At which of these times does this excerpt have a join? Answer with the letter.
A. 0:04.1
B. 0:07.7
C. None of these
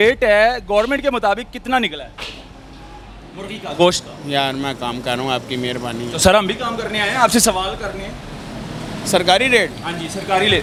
C